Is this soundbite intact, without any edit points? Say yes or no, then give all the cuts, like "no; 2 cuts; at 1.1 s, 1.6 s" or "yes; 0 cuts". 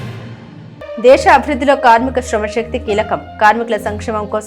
no; 1 cut; at 0.9 s